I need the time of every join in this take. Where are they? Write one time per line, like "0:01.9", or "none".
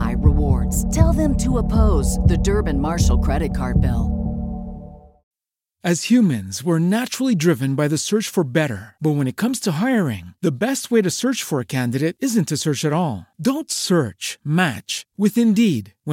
0:05.2